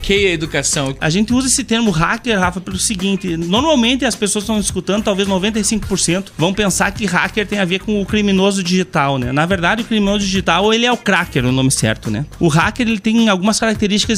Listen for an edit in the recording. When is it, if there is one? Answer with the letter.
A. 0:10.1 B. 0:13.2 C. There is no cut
A